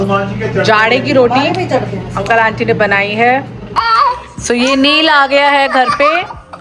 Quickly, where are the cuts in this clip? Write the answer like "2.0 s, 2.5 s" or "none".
3.6 s